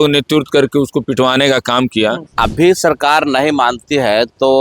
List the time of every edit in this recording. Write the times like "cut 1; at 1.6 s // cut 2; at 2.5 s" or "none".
cut 1; at 2.4 s